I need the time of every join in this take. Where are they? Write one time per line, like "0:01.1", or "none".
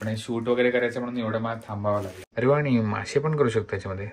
0:02.3